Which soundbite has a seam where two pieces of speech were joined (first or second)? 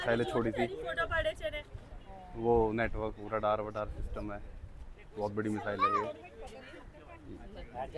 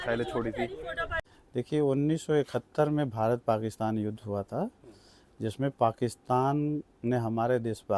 second